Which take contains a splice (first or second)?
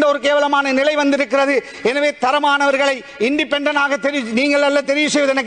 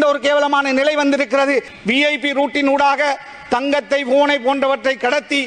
second